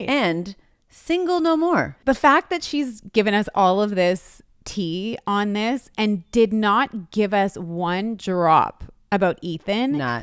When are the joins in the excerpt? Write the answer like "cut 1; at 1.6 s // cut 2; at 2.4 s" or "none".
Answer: cut 1; at 1.9 s